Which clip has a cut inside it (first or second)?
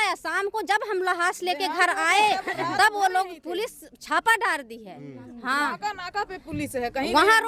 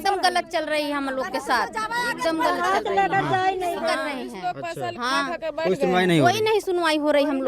second